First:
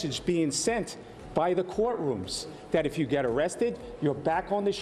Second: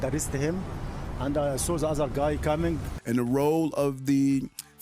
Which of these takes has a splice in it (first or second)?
second